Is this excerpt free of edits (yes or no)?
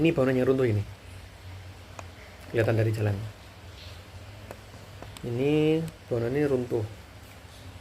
yes